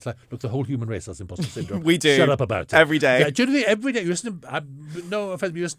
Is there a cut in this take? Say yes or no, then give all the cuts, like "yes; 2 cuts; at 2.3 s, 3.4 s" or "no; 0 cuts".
no; 0 cuts